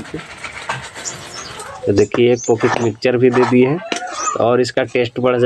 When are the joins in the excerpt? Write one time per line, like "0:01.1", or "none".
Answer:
0:01.7